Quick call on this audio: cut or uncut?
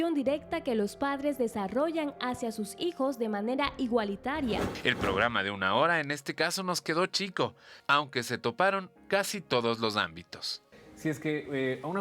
cut